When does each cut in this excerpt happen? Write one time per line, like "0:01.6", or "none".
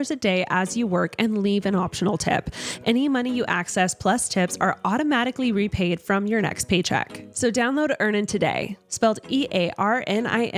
0:07.2